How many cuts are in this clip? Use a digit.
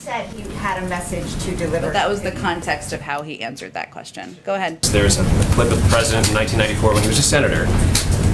1